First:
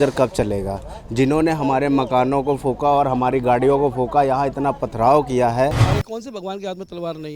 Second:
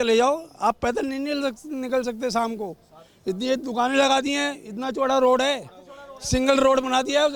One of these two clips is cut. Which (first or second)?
first